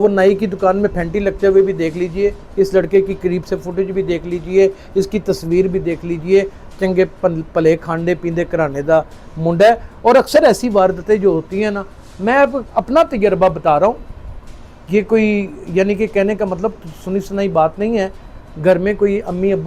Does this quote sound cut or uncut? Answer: uncut